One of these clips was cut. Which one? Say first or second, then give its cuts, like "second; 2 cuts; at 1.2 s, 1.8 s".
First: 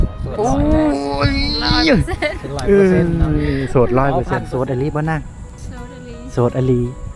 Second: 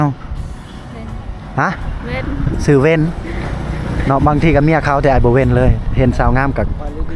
first; 1 cut; at 4.5 s